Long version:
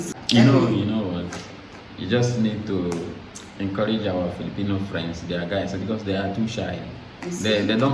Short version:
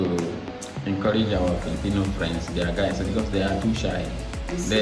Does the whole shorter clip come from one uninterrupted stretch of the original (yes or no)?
yes